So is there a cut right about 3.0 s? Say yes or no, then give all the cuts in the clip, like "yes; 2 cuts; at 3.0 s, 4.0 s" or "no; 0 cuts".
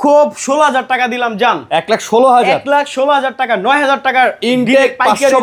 no; 0 cuts